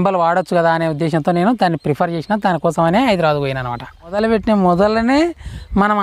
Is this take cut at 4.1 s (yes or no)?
yes